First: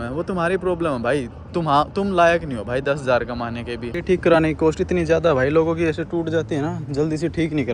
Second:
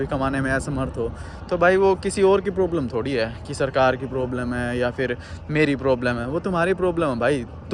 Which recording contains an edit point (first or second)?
first